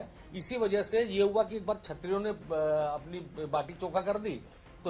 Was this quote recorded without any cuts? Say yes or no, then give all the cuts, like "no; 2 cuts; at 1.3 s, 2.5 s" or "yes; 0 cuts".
yes; 0 cuts